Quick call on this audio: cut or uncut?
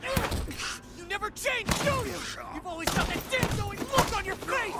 uncut